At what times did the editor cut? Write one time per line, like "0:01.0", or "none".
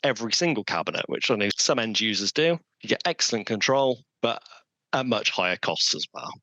0:01.5
0:02.7
0:04.1